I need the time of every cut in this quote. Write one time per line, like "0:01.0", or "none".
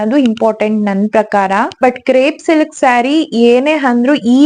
0:01.7